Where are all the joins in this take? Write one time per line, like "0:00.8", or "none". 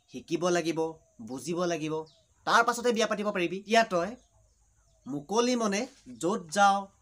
0:03.6